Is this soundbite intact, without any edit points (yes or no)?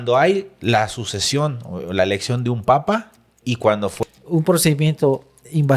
no